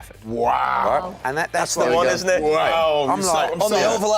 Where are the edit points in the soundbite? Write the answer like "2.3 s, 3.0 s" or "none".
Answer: none